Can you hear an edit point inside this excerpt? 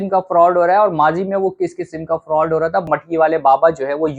yes; 1 cut; at 2.9 s

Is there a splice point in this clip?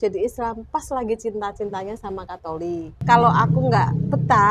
yes; 1 cut; at 3.0 s

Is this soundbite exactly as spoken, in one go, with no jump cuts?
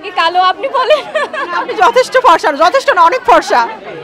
yes; 0 cuts

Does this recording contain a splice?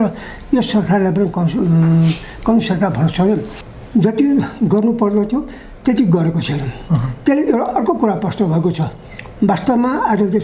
yes; 1 cut; at 3.6 s

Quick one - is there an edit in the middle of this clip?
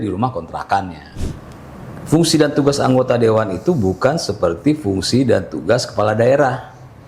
yes; 1 cut; at 1.1 s

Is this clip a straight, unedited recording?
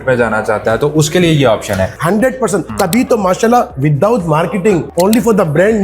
no; 3 cuts; at 2.0 s, 2.7 s, 4.9 s

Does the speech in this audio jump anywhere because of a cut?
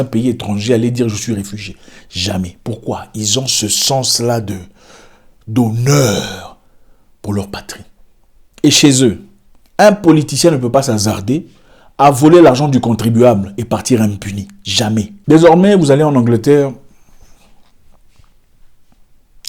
yes; 1 cut; at 15.1 s

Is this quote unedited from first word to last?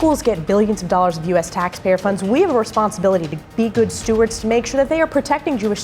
yes; 0 cuts

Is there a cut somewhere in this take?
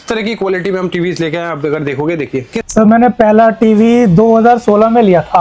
no; 0 cuts

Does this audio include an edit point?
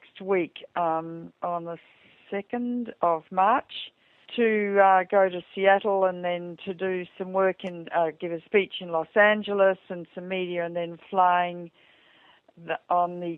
no; 0 cuts

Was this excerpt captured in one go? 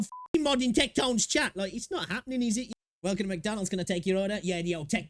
no; 1 cut; at 2.7 s

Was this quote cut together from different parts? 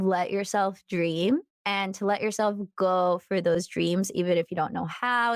yes; 1 cut; at 1.6 s

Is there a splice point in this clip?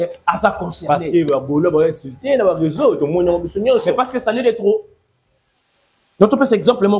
no; 0 cuts

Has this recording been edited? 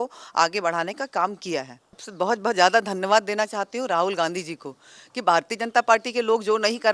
yes; 1 cut; at 2.0 s

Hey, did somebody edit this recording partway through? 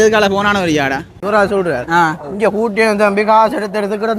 yes; 1 cut; at 1.2 s

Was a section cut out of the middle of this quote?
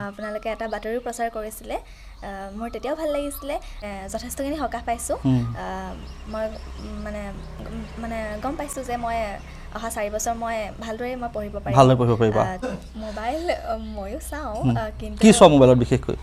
yes; 2 cuts; at 3.9 s, 12.6 s

